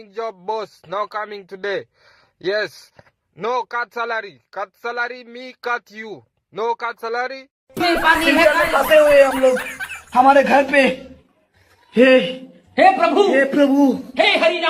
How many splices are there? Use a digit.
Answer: 1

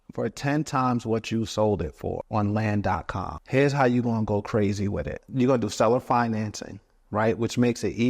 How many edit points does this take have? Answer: 3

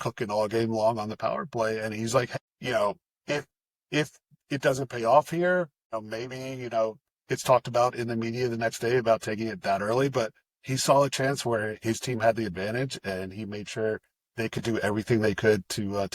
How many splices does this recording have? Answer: 2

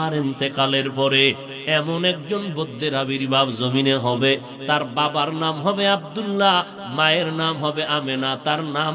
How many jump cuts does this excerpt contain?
1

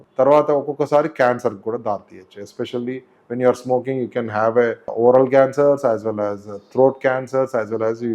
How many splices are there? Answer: 1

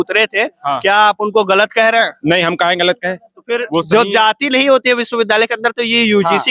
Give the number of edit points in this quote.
0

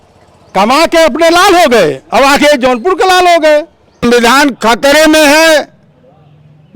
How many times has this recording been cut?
1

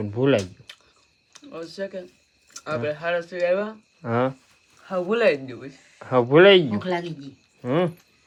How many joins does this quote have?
0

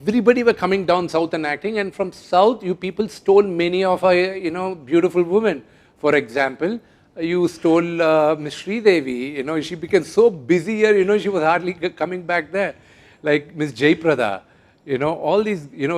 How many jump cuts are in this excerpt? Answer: 0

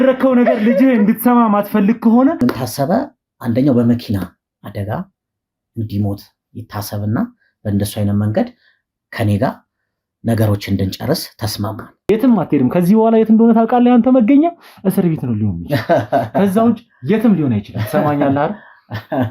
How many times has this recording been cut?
2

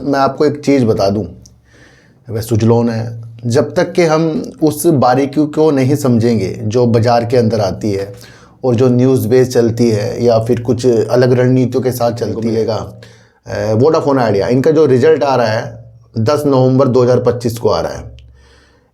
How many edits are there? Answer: 1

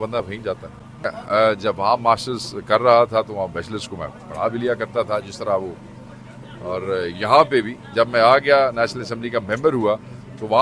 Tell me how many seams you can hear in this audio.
1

